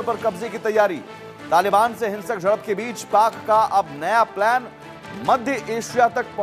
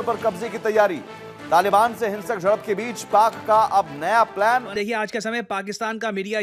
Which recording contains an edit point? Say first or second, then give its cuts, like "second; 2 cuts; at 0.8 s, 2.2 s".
second; 1 cut; at 4.8 s